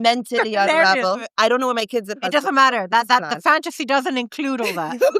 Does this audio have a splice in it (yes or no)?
yes